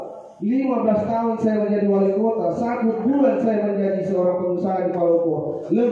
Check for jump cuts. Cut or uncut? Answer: uncut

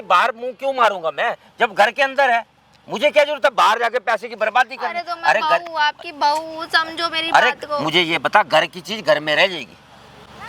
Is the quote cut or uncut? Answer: uncut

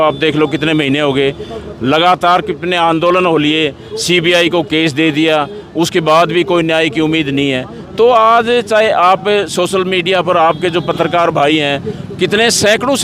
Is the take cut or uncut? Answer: uncut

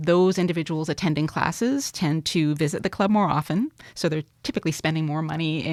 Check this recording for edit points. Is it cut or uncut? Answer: uncut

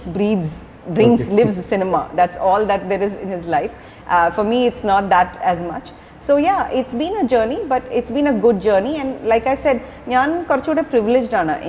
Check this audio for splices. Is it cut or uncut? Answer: uncut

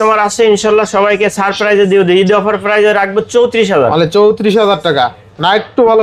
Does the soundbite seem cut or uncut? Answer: uncut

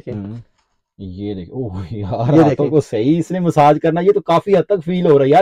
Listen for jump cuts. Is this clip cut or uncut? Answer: uncut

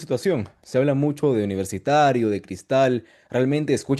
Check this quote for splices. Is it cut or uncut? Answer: uncut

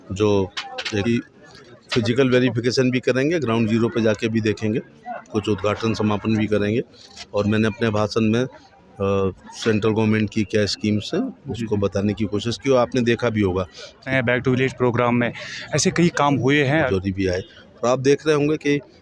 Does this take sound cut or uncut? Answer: cut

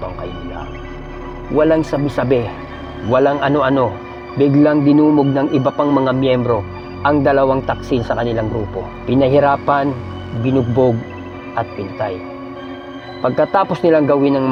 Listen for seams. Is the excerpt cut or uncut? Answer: uncut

